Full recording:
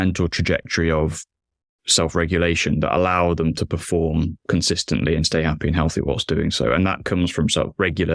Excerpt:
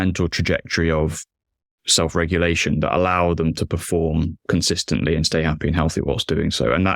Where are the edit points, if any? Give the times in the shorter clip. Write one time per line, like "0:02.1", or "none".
none